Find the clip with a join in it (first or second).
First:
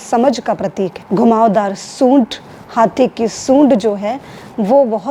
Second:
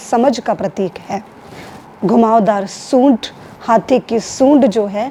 first